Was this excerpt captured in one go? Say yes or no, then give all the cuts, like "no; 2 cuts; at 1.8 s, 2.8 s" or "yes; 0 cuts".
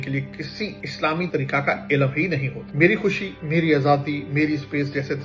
no; 1 cut; at 2.6 s